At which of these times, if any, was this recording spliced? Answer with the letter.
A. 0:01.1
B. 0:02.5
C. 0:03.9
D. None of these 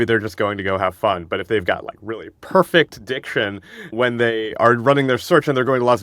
C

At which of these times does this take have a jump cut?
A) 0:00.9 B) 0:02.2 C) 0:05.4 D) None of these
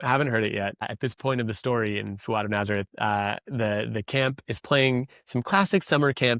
A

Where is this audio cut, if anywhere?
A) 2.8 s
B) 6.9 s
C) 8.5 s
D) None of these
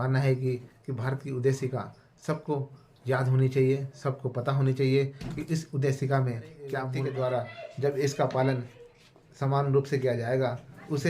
B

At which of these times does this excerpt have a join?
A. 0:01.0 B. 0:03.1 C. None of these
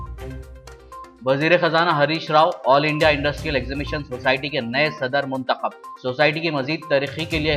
A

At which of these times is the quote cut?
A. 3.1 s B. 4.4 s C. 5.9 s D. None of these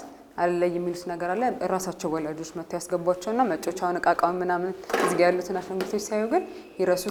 D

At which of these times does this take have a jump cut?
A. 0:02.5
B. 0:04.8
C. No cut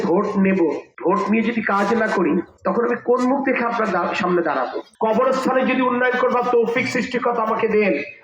B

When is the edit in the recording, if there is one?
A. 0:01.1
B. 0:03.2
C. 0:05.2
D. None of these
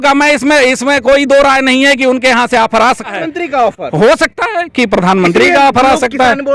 B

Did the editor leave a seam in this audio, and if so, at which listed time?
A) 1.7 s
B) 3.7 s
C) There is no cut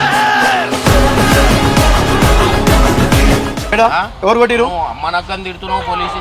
B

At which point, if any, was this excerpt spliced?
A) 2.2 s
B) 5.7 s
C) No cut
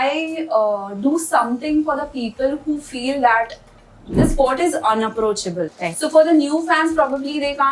B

